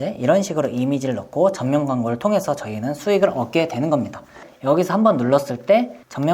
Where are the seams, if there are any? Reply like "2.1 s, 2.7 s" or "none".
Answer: 4.4 s